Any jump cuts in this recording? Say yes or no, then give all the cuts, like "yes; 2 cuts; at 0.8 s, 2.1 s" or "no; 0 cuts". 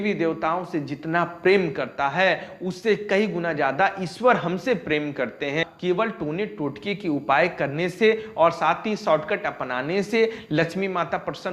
yes; 1 cut; at 5.7 s